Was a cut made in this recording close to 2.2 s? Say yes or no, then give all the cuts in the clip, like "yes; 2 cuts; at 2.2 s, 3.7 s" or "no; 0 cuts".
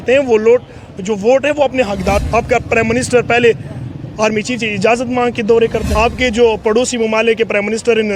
yes; 2 cuts; at 2.2 s, 5.9 s